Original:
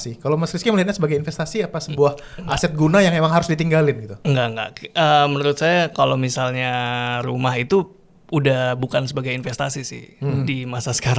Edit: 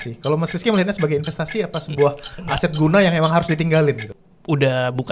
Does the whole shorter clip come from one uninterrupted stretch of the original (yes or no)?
no